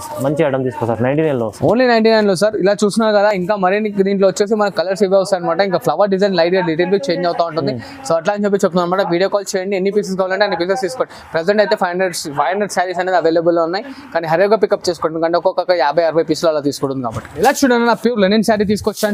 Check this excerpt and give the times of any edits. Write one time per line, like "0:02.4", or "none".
none